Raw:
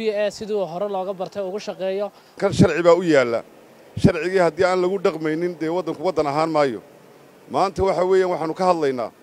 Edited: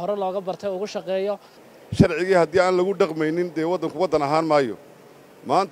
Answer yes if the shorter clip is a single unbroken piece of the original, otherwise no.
no